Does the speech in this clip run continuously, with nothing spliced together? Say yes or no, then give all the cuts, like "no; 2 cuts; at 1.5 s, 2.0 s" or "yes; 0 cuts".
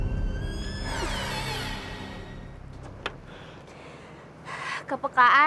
no; 1 cut; at 2.3 s